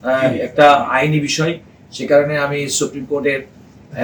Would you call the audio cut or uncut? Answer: uncut